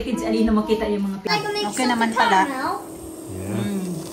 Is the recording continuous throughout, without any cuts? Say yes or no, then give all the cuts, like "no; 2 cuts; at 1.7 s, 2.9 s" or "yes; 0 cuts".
no; 1 cut; at 1.3 s